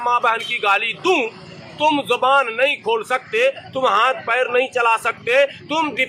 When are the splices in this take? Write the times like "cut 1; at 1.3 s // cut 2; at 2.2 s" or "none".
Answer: none